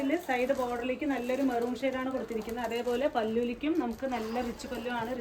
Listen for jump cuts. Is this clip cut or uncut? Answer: uncut